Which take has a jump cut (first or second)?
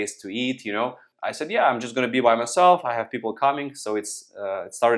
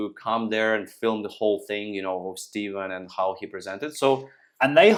first